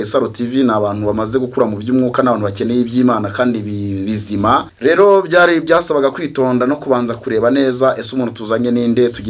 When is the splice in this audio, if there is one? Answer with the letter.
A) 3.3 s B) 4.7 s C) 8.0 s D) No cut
B